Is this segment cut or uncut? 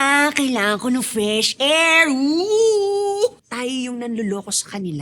cut